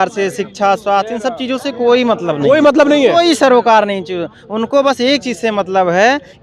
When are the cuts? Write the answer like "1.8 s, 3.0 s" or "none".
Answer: none

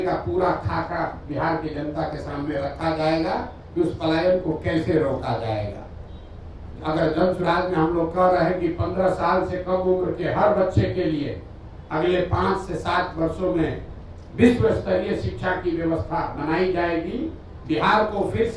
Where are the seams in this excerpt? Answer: none

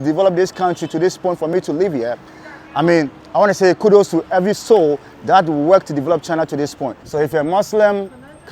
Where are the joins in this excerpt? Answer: 7.1 s

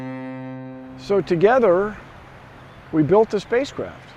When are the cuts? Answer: 0.9 s

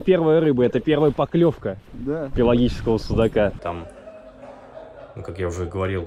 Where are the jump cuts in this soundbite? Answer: 3.6 s

